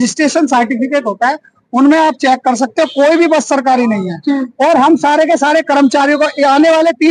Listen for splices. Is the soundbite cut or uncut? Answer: uncut